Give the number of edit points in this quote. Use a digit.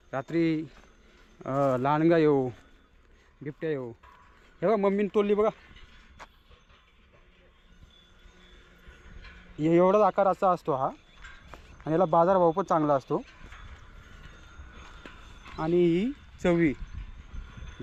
0